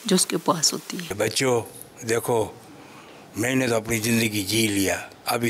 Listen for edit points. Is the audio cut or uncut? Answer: cut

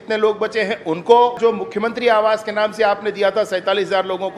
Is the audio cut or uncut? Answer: cut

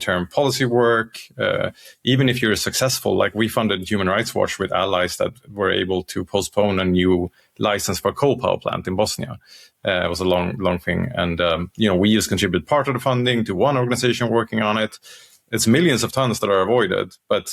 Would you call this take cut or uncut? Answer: uncut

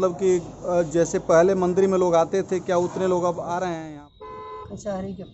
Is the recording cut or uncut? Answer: cut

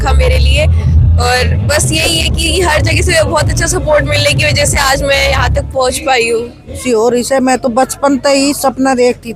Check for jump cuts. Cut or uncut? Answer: cut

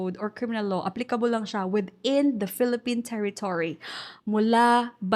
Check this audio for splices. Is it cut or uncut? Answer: uncut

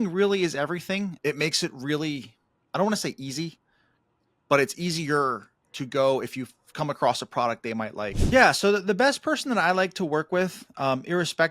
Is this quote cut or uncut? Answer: cut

